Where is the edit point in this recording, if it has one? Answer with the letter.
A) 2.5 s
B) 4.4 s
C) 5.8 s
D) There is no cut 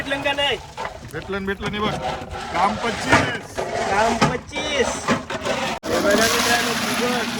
C